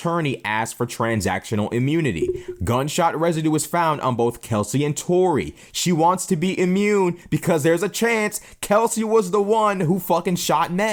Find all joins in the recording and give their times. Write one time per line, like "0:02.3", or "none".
none